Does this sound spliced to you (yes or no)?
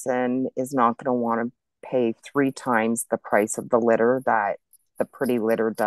no